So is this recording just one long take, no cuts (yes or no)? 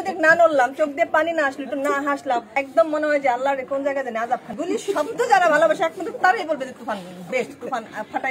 no